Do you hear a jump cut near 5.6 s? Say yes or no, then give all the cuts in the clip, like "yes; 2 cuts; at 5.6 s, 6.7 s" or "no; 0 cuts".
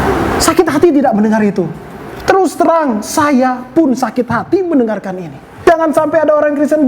yes; 1 cut; at 5.6 s